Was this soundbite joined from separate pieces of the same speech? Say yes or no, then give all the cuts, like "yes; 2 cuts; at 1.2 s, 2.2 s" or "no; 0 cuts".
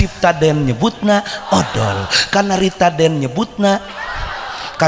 no; 0 cuts